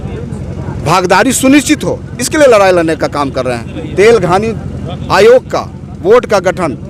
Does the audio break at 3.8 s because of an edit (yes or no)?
no